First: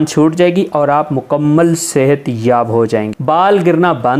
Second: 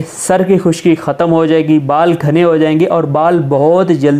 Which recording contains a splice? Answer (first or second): first